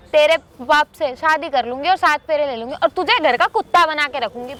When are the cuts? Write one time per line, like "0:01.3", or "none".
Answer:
none